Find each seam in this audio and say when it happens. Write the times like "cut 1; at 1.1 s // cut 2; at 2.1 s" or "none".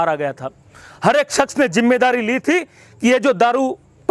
none